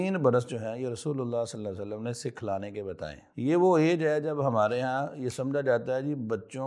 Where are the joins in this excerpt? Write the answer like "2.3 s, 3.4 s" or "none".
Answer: 3.2 s

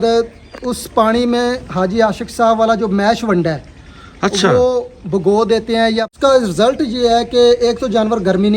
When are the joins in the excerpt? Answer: 6.1 s

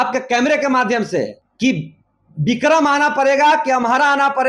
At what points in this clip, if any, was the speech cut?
1.4 s

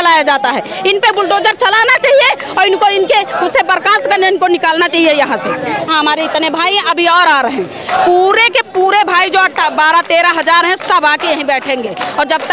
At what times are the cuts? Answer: 5.9 s

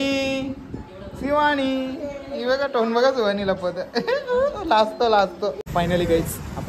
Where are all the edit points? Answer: 5.6 s

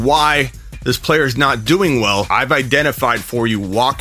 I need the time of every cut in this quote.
2.3 s

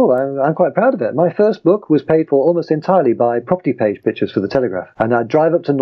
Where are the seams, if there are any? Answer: 4.8 s

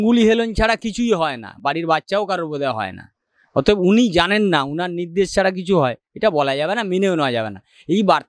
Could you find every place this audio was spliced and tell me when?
none

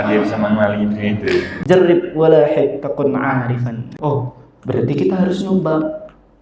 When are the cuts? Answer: 1.5 s, 3.9 s

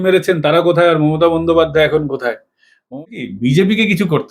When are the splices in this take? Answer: 2.9 s

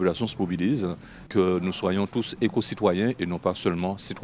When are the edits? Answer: 1.2 s

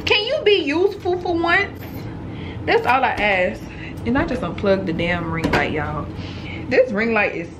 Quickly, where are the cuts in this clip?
6.4 s

